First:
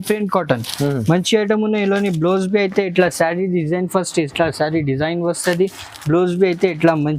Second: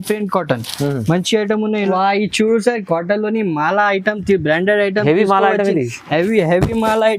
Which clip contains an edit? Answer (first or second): second